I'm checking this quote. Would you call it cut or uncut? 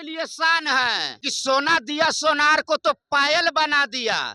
cut